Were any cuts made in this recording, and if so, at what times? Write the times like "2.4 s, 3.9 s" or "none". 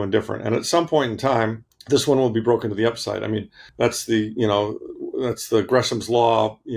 1.7 s, 3.6 s